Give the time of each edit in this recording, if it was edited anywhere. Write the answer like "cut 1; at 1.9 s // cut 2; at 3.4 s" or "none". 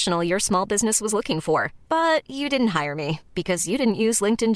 none